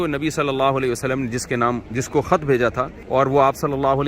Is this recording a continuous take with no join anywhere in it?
no; 2 cuts; at 1.9 s, 3.0 s

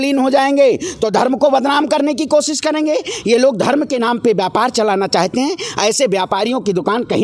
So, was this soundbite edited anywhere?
no; 0 cuts

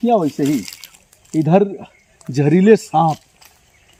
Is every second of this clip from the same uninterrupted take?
yes; 0 cuts

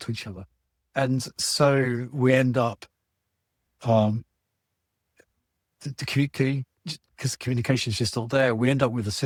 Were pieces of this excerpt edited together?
no; 0 cuts

